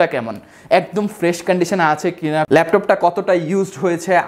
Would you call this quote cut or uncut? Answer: uncut